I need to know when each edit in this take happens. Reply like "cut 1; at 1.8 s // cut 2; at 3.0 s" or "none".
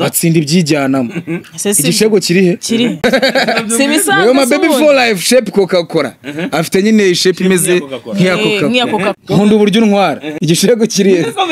cut 1; at 3.0 s // cut 2; at 9.2 s // cut 3; at 10.3 s